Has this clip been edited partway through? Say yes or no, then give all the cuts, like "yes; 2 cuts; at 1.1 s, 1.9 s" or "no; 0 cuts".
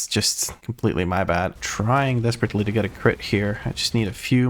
yes; 1 cut; at 1.5 s